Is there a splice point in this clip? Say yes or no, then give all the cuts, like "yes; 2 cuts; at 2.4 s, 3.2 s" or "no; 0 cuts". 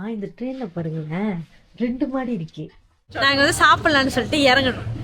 yes; 1 cut; at 3.1 s